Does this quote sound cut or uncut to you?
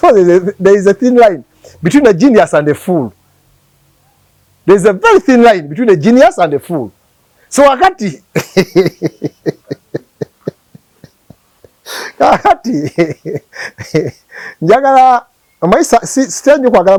uncut